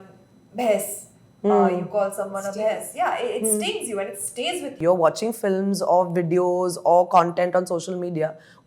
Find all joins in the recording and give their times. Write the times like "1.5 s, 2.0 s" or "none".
4.8 s